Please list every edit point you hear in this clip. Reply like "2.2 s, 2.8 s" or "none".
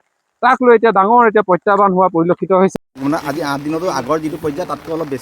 2.7 s